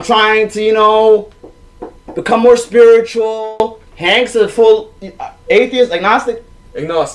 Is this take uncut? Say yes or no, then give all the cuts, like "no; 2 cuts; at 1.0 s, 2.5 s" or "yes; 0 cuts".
yes; 0 cuts